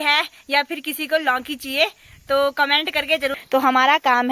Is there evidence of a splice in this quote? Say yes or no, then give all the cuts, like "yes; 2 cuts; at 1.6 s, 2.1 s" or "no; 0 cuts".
yes; 1 cut; at 3.4 s